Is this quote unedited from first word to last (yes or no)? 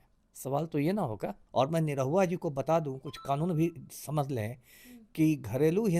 no